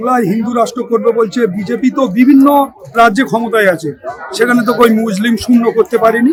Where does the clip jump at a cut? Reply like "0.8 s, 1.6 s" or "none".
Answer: none